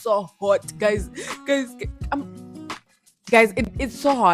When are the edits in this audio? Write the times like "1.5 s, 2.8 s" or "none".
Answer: none